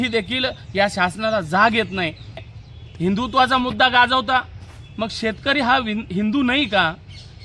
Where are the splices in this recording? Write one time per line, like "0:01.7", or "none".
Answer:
0:02.4